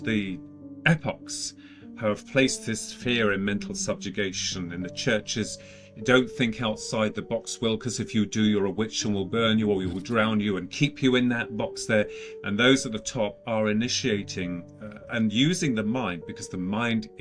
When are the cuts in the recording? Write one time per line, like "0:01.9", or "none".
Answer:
none